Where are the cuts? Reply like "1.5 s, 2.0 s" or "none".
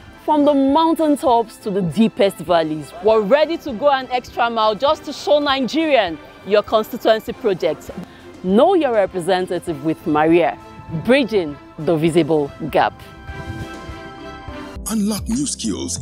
14.8 s